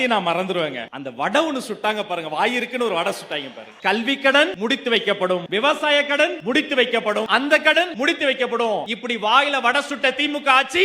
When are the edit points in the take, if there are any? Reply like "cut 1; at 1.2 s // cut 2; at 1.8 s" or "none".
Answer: cut 1; at 4.5 s // cut 2; at 6.4 s // cut 3; at 7.3 s // cut 4; at 7.9 s // cut 5; at 8.9 s